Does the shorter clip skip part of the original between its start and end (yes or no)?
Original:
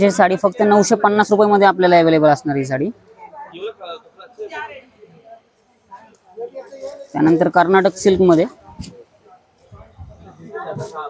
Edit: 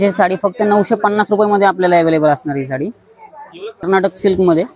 yes